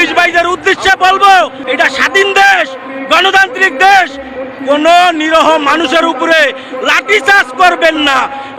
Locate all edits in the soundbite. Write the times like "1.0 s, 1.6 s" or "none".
none

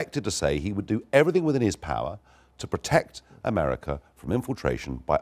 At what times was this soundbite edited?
2.2 s

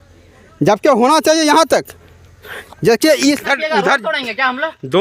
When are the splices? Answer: 3.4 s

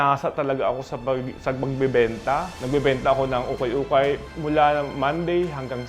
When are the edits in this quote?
2.5 s, 4.3 s

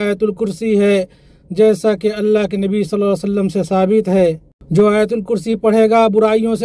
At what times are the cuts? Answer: 4.4 s

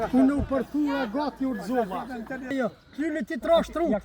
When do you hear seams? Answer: 2.5 s

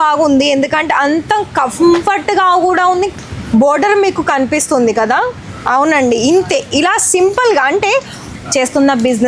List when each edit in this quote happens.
3.1 s, 8.2 s

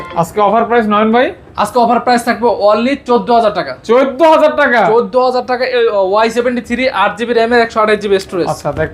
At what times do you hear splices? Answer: none

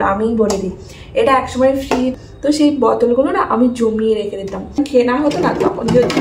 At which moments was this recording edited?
2.1 s, 4.8 s

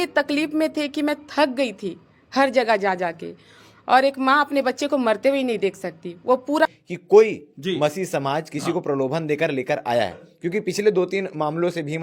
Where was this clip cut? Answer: 6.6 s

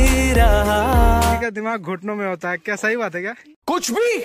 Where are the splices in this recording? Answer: 1.4 s

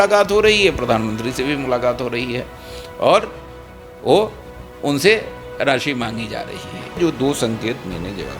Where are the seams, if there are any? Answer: 7.0 s

